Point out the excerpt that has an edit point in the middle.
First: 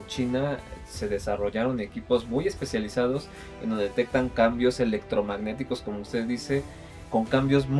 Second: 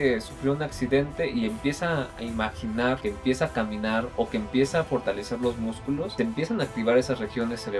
second; 2 cuts; at 3.0 s, 6.1 s

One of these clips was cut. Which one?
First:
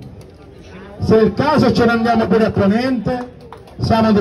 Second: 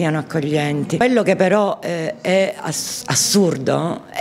second; 1 cut; at 1.0 s

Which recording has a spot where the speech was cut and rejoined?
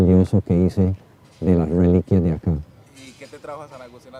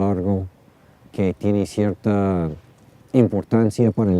second; 1 cut; at 1.4 s

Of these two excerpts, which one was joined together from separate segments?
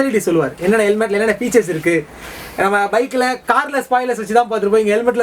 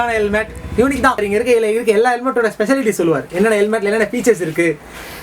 second; 1 cut; at 1.2 s

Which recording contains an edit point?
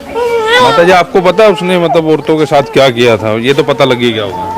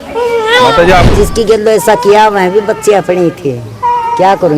second; 1 cut; at 1.1 s

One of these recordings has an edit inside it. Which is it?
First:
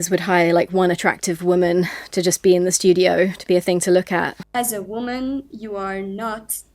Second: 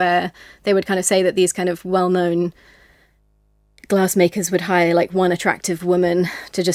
first; 1 cut; at 4.4 s

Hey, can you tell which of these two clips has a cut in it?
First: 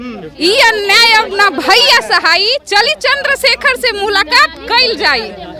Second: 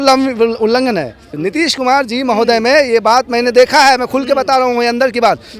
second; 1 cut; at 1.4 s

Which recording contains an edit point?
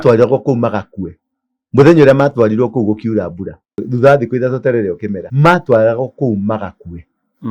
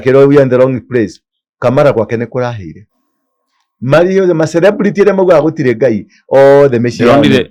first; 2 cuts; at 3.9 s, 5.2 s

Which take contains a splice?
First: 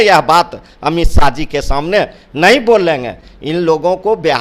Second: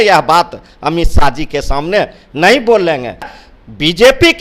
second; 1 cut; at 3.4 s

